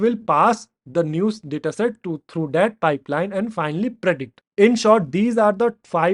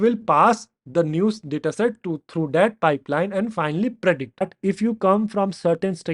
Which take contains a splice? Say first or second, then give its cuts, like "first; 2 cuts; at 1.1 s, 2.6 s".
second; 1 cut; at 4.5 s